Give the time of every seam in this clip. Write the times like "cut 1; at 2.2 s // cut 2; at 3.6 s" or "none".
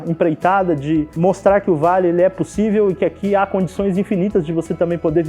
cut 1; at 1.1 s